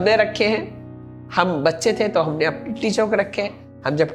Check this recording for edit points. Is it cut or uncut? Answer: uncut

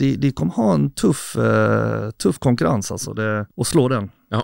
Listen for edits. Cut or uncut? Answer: cut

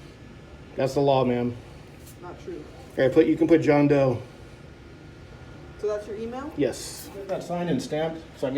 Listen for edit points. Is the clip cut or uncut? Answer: cut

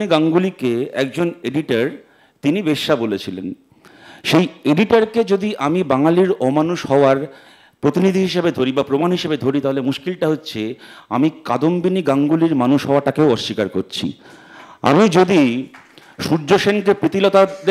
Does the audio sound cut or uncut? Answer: uncut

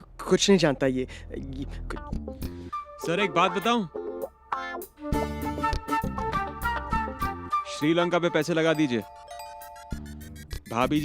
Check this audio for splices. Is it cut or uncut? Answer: cut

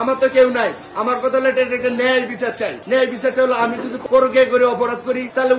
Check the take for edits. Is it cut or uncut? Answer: cut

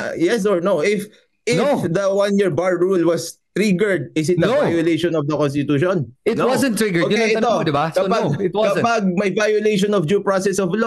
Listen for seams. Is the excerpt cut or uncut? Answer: uncut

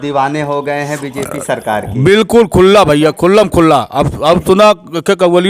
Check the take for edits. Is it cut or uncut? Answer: uncut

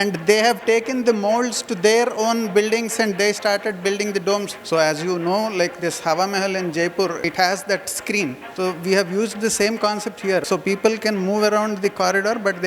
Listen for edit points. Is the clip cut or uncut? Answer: cut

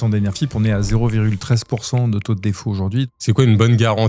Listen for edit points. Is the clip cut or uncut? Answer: cut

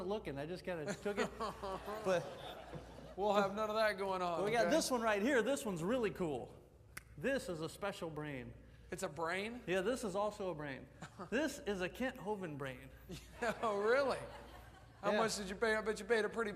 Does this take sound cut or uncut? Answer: uncut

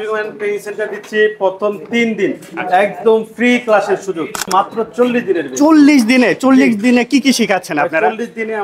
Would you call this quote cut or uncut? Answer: cut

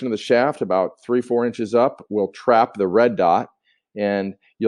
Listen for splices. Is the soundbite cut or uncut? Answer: uncut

